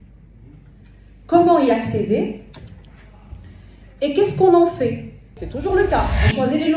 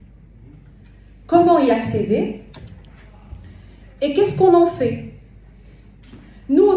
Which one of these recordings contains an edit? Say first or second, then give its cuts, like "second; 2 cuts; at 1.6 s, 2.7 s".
first; 1 cut; at 5.4 s